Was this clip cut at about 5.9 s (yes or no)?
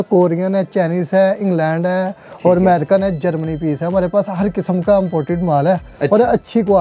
no